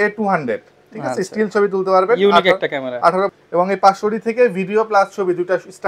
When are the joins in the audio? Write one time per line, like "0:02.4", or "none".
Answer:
0:03.4